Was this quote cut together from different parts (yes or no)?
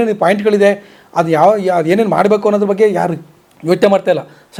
no